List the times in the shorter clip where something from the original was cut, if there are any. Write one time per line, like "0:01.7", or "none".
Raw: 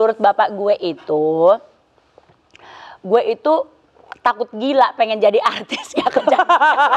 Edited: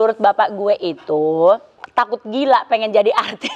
0:01.8